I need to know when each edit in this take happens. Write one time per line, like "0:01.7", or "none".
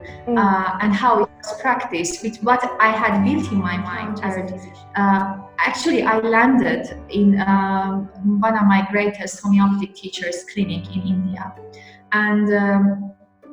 0:04.0